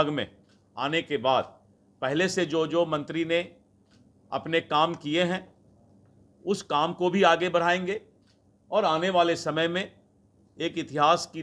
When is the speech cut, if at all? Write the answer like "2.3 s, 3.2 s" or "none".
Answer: none